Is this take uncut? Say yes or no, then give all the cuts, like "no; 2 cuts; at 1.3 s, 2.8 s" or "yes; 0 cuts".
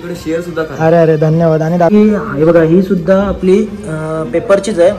no; 1 cut; at 1.9 s